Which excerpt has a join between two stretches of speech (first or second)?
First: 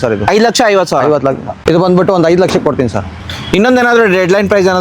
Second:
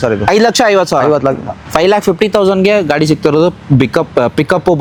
first